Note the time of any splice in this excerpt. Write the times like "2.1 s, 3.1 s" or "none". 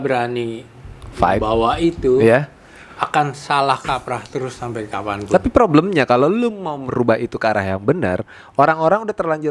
none